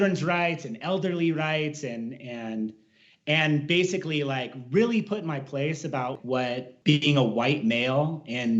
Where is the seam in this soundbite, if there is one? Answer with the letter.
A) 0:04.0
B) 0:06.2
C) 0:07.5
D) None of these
B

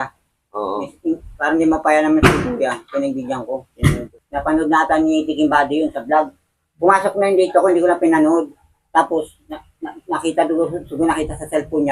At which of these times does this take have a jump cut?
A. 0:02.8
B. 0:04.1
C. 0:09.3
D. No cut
B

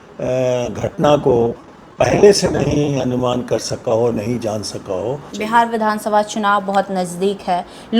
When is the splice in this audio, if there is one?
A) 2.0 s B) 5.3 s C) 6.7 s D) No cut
B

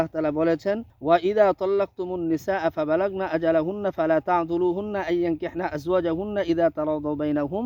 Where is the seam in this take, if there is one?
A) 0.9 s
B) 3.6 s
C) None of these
A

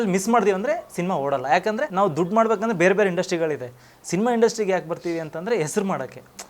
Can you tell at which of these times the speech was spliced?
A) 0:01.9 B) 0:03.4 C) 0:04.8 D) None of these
A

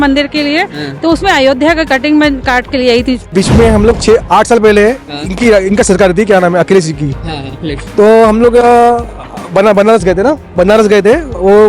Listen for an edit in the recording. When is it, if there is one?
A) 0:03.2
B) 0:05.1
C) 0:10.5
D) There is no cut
A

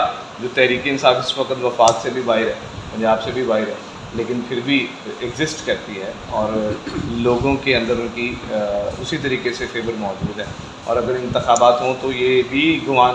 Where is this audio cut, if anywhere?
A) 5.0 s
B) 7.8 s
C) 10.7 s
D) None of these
D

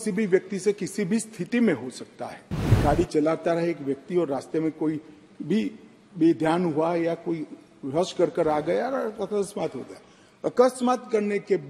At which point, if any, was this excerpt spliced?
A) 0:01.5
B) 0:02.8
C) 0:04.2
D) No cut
B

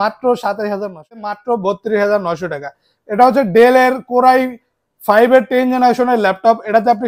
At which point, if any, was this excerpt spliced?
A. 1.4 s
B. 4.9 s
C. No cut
A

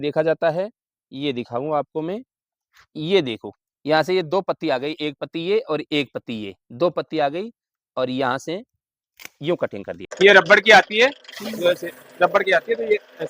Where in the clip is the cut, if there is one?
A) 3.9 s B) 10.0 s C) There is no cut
B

